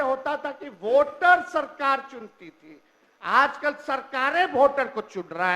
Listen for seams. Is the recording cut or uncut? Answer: uncut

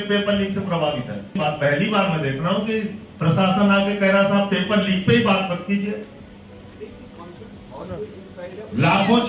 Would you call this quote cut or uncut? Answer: cut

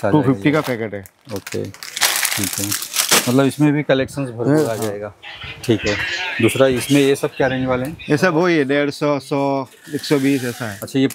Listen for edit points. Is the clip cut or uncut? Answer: uncut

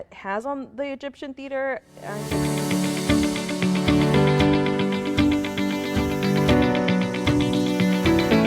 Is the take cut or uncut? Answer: cut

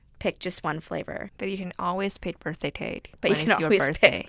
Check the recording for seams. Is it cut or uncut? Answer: cut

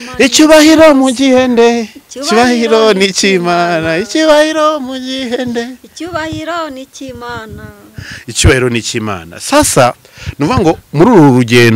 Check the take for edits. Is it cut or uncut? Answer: uncut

